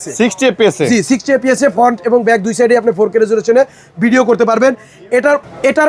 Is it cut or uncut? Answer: uncut